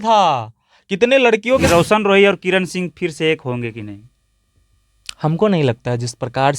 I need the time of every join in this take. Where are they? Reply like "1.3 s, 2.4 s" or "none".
1.6 s